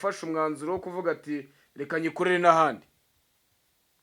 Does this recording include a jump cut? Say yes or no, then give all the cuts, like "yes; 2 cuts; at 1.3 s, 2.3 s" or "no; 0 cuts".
no; 0 cuts